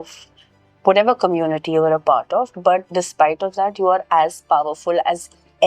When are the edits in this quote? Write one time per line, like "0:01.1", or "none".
none